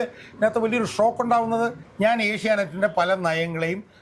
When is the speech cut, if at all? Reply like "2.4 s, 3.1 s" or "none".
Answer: 1.8 s